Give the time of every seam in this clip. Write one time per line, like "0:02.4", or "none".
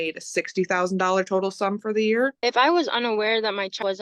0:02.4